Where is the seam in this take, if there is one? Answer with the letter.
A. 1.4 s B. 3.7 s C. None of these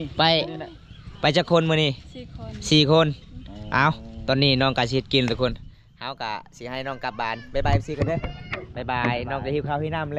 C